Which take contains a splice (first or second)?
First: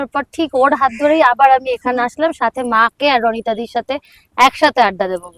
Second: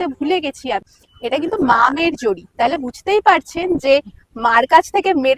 second